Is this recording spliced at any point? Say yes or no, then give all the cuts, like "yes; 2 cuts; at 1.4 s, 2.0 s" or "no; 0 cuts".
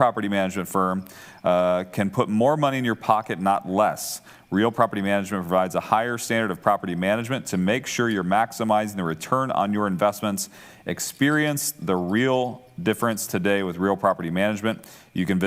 no; 0 cuts